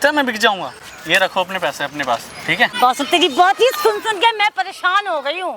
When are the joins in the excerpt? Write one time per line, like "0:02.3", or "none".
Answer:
0:02.8